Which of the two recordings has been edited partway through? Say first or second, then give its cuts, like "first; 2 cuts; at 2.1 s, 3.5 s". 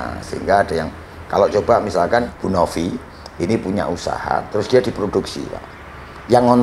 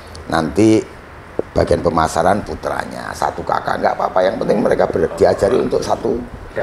first; 1 cut; at 2.3 s